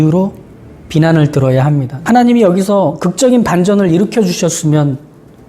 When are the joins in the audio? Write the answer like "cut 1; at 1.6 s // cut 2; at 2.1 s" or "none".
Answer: cut 1; at 1.9 s